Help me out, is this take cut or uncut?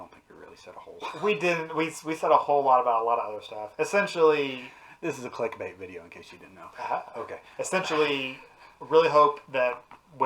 uncut